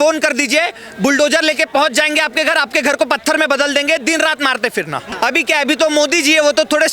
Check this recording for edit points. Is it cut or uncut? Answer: cut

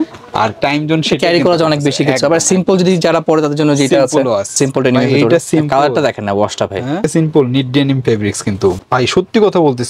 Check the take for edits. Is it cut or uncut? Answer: cut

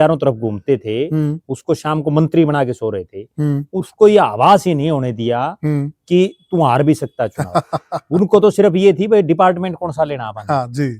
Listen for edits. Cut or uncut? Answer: uncut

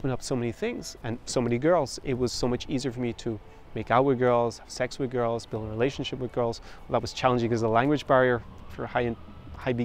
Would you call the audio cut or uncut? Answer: cut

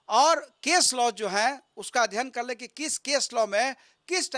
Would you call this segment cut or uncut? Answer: uncut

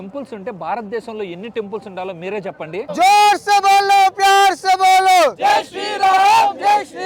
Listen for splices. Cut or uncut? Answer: uncut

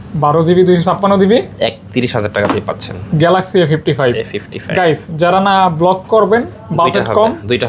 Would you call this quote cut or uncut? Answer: uncut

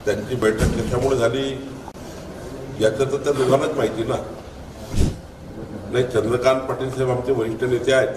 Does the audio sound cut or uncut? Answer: cut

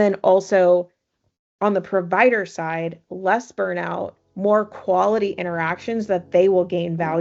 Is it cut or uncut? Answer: uncut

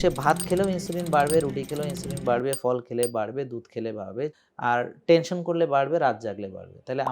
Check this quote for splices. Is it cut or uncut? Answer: cut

